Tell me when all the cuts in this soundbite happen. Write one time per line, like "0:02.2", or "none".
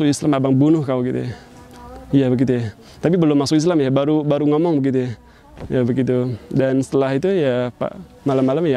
none